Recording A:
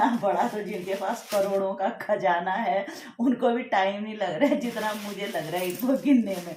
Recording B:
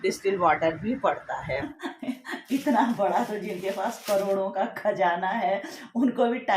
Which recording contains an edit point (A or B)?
B